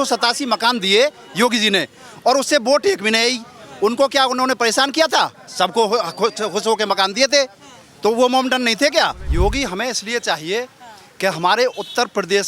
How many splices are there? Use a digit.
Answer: 1